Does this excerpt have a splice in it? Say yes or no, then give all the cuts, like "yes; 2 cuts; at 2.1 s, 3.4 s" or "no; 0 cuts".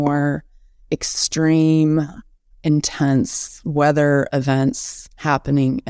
no; 0 cuts